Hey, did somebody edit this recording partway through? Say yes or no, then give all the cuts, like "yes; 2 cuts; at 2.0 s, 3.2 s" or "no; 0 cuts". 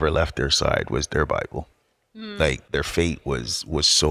yes; 1 cut; at 2.6 s